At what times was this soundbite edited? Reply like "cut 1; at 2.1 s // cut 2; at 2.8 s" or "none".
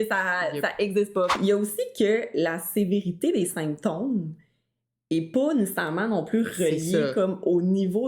cut 1; at 1.3 s

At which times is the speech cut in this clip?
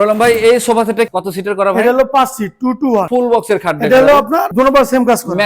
cut 1; at 1.1 s // cut 2; at 3.1 s

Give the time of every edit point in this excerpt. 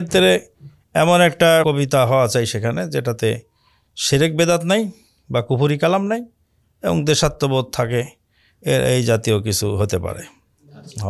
cut 1; at 1.6 s

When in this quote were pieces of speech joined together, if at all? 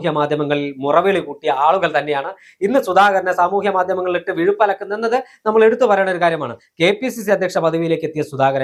none

